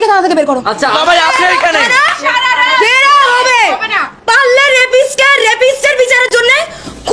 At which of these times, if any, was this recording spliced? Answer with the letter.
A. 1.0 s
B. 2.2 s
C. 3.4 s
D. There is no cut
A